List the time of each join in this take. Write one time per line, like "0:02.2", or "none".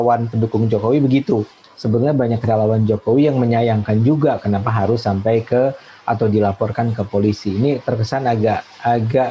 0:01.6